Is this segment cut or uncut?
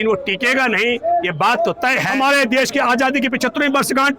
cut